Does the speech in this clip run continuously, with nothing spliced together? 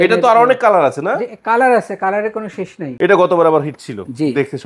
no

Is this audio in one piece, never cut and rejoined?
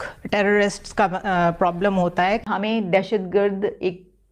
no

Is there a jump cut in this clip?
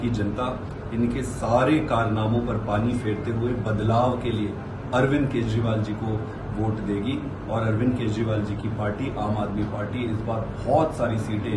no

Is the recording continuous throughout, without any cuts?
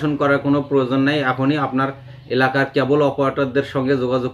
yes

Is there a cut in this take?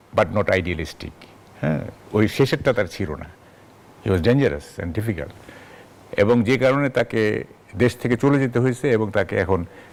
no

